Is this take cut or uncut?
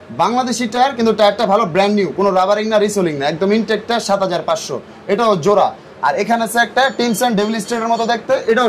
uncut